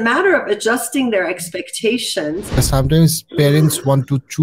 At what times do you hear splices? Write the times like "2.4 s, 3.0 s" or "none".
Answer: 2.6 s